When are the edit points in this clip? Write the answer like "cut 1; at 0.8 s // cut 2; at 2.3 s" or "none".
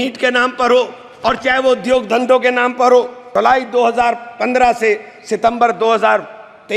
cut 1; at 3.2 s